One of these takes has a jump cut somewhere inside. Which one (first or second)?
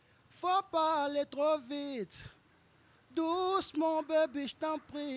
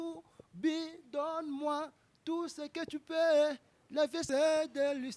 second